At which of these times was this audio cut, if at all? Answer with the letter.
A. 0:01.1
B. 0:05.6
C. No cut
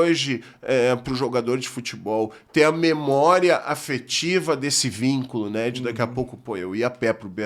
C